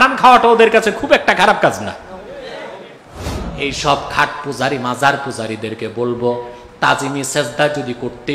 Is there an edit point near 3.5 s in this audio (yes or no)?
yes